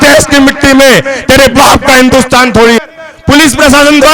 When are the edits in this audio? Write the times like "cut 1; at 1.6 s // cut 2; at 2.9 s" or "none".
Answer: cut 1; at 2.8 s